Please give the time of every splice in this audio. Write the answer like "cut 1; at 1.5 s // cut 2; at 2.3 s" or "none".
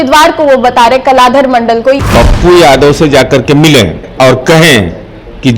cut 1; at 2.0 s